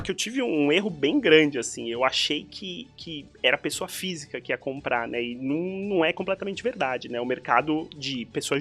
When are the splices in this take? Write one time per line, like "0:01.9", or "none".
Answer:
none